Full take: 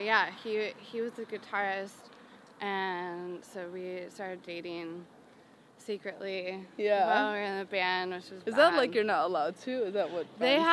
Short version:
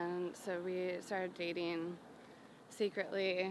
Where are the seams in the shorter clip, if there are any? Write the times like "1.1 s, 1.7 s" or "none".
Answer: none